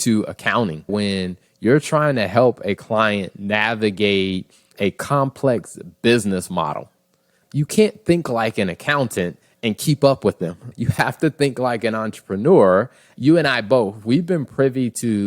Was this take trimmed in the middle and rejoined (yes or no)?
yes